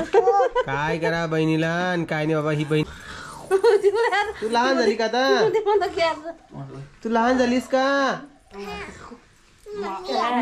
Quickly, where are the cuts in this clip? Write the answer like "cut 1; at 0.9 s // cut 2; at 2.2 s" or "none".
cut 1; at 2.9 s